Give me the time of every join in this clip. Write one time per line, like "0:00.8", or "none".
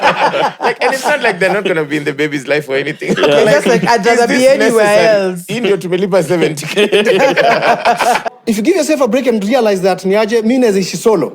0:08.2